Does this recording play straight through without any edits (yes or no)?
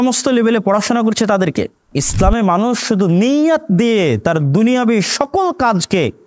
no